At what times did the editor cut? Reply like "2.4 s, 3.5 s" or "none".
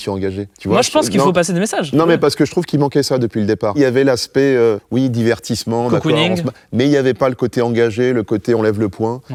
none